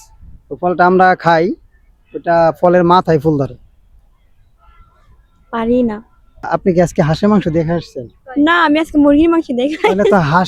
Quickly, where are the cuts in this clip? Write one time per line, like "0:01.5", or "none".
0:06.5